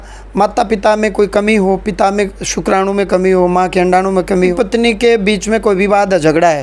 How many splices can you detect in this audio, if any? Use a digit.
1